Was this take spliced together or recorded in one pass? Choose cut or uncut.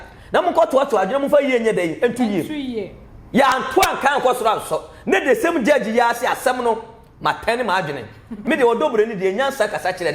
cut